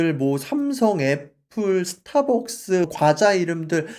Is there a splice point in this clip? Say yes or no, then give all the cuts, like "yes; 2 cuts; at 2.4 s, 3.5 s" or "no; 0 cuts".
no; 0 cuts